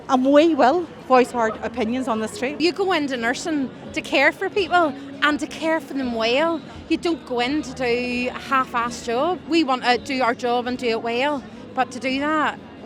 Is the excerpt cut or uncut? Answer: cut